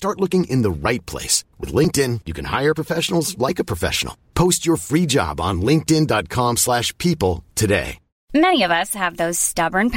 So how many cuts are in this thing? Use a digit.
1